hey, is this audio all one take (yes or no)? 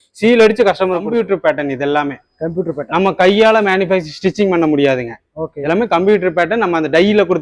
no